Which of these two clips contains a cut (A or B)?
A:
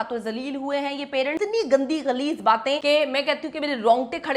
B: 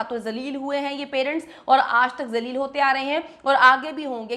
A